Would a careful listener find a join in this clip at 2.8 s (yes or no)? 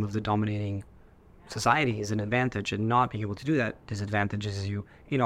no